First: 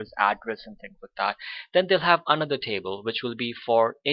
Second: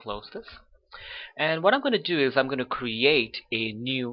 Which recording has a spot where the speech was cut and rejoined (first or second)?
second